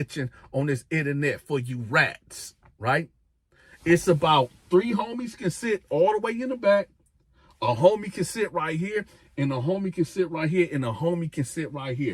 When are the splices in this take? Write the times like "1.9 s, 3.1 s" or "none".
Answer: none